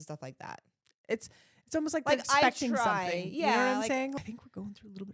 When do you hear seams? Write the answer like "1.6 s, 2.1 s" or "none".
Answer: 4.1 s